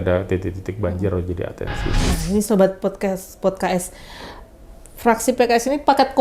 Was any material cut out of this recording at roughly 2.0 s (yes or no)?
yes